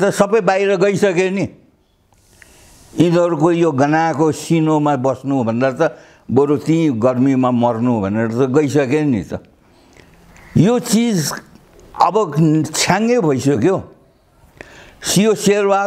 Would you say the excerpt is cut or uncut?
uncut